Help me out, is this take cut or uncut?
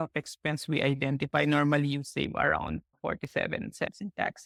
uncut